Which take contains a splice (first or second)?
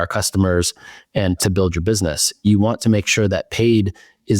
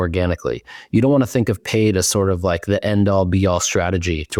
first